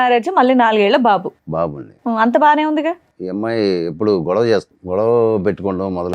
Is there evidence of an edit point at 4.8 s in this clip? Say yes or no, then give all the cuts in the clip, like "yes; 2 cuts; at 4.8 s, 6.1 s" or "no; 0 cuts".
yes; 2 cuts; at 3.1 s, 4.8 s